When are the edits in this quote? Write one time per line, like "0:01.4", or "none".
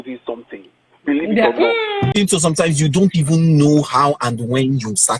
0:02.1